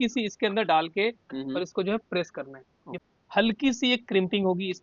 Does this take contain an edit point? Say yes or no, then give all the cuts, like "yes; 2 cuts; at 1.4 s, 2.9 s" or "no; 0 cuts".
yes; 1 cut; at 3.0 s